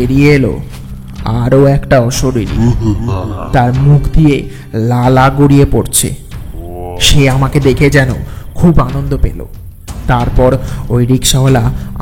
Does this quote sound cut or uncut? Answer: uncut